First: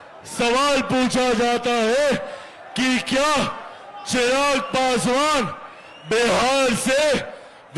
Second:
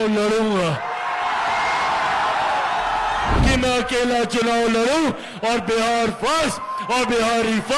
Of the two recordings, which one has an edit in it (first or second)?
second